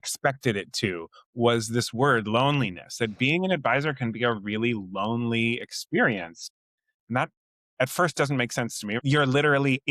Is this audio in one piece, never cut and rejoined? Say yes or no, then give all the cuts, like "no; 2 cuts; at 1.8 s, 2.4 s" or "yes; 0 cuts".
no; 1 cut; at 9.0 s